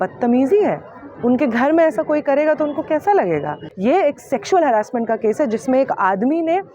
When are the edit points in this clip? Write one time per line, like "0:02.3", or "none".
0:03.7